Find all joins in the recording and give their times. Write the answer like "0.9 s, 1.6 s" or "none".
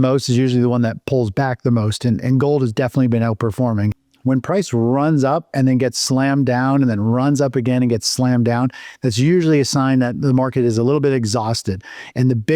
3.9 s